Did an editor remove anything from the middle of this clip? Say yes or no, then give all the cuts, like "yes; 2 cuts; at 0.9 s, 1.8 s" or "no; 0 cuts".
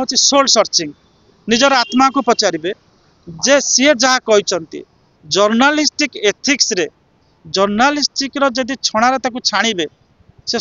no; 0 cuts